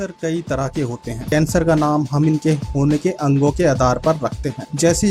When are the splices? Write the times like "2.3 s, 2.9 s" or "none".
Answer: 1.3 s